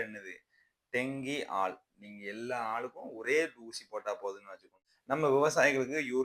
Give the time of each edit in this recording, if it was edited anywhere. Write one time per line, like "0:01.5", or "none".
0:04.9